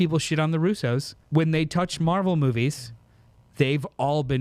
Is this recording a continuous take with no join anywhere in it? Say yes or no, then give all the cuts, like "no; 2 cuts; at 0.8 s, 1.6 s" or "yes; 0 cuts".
no; 1 cut; at 1.1 s